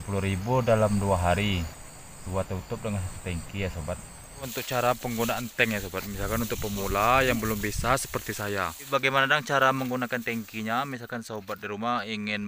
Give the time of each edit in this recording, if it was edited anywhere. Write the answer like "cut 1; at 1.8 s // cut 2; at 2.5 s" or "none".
cut 1; at 4.6 s // cut 2; at 8.9 s